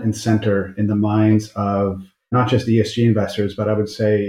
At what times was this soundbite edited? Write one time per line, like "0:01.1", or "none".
0:02.3